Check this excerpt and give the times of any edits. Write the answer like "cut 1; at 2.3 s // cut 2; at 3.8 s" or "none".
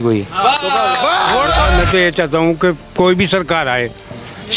cut 1; at 1.8 s